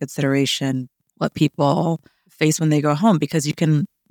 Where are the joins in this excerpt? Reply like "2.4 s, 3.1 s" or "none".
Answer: 1.0 s, 2.3 s